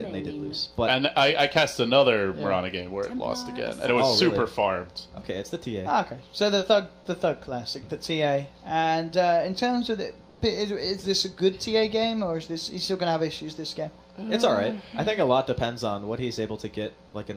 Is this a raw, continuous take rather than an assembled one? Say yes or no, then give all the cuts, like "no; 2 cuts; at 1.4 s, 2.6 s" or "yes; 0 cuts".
no; 1 cut; at 6.1 s